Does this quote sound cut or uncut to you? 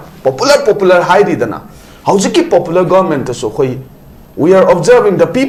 uncut